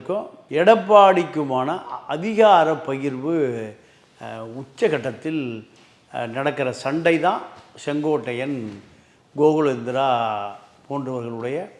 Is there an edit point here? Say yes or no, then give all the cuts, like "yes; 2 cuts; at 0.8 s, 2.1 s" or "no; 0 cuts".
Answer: no; 0 cuts